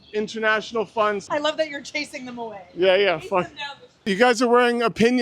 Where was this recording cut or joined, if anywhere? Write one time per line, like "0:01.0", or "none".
0:01.3